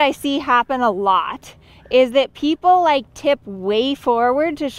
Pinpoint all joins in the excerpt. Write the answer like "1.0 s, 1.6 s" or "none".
none